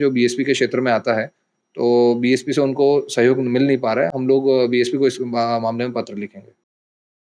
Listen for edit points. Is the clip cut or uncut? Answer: uncut